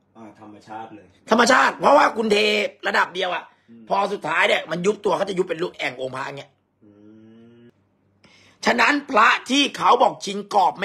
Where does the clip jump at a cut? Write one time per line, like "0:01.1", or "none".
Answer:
0:07.7